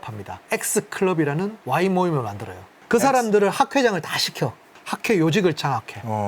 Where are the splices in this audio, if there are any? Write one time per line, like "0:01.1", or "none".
0:02.7
0:04.7